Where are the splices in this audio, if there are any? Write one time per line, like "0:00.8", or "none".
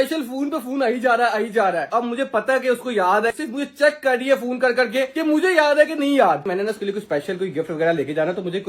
0:01.9
0:03.3
0:06.4